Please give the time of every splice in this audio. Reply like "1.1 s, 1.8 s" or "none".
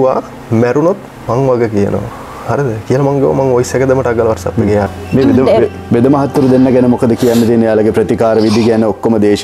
5.0 s